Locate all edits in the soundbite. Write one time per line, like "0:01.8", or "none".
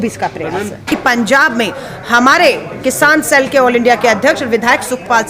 0:00.9